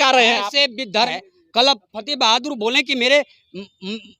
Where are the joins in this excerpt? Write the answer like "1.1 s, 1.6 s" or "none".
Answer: 1.2 s